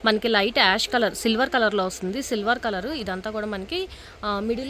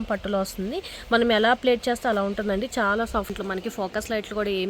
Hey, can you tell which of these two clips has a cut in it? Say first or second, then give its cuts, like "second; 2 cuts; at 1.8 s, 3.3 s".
second; 1 cut; at 3.3 s